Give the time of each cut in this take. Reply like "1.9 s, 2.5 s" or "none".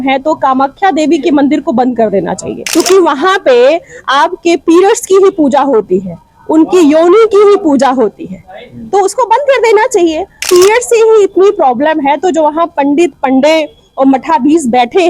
2.5 s, 10.4 s